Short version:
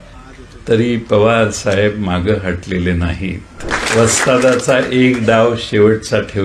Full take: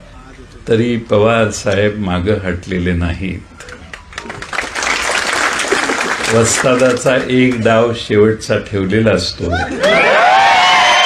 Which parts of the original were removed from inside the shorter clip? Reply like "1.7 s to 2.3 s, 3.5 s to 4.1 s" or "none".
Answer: 3.7 s to 6.1 s